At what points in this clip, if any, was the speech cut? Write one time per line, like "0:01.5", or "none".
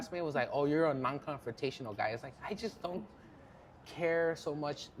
none